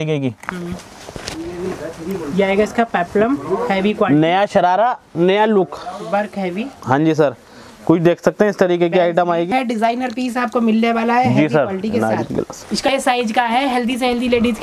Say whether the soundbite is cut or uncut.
cut